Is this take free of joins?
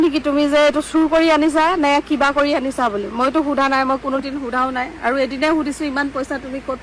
yes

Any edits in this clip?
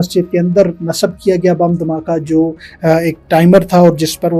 no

